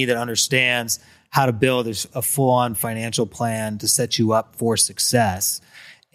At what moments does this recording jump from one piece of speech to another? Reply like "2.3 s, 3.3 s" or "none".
none